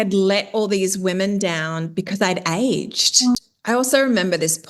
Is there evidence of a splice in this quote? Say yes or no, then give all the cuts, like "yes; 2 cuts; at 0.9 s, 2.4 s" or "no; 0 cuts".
yes; 1 cut; at 3.4 s